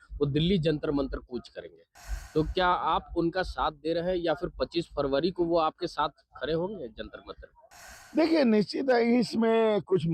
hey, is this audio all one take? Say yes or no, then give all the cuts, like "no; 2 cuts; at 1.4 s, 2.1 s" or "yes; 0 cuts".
yes; 0 cuts